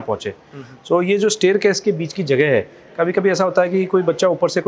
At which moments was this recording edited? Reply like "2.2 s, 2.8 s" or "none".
none